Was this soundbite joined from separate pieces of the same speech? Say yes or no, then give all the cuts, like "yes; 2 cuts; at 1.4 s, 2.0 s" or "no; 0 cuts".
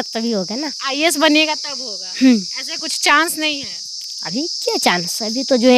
no; 0 cuts